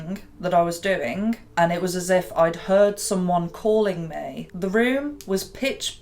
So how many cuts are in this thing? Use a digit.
2